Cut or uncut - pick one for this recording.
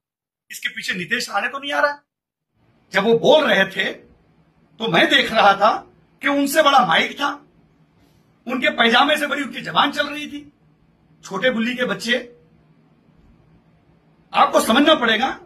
cut